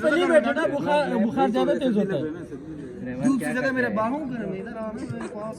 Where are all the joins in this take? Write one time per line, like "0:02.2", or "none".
none